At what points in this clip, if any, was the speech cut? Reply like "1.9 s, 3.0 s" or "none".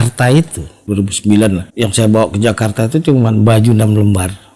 0.8 s, 1.7 s